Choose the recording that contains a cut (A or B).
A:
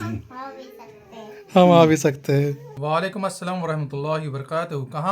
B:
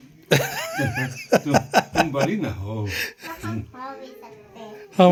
A